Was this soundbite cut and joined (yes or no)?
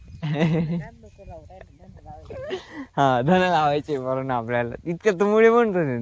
no